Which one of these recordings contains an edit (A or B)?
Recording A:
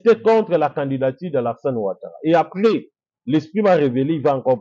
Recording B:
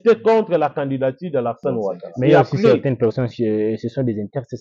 B